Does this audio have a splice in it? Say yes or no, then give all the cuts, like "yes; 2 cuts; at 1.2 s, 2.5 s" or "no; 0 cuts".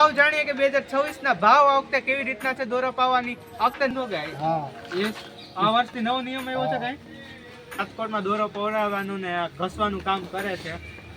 yes; 2 cuts; at 3.9 s, 7.9 s